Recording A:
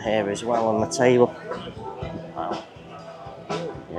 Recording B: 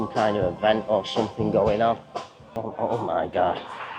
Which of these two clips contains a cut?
B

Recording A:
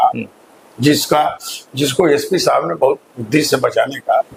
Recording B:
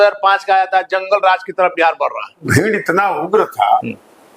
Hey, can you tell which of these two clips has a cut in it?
B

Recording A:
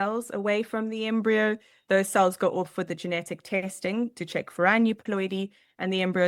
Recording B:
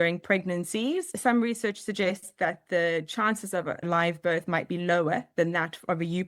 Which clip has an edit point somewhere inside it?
B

